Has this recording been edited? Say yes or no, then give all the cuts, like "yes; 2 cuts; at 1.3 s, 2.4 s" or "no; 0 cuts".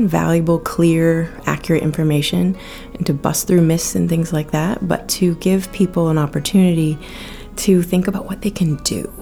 no; 0 cuts